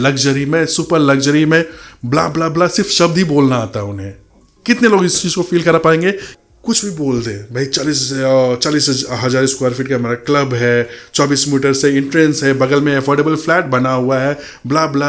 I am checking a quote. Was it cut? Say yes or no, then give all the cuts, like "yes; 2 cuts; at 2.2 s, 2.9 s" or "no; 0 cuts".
yes; 1 cut; at 6.3 s